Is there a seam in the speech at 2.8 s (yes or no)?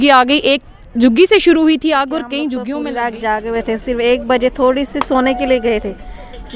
yes